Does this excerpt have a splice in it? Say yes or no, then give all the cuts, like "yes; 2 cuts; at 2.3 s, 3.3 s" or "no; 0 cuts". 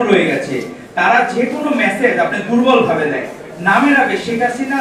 no; 0 cuts